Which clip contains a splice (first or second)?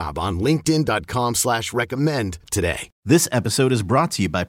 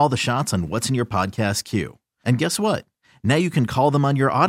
first